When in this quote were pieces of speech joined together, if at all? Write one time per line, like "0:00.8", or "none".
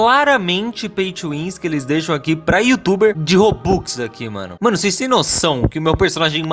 0:04.4